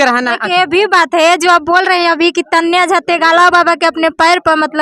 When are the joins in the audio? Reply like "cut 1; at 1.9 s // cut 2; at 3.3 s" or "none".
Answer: none